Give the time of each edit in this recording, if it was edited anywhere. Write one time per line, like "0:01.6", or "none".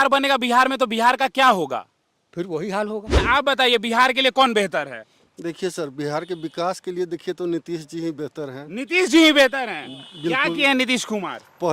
0:03.2